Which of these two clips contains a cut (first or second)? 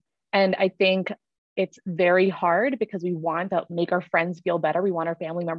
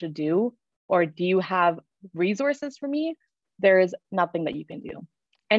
first